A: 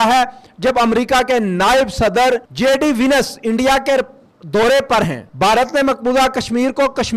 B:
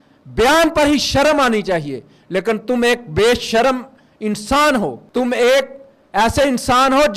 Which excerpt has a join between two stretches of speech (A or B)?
B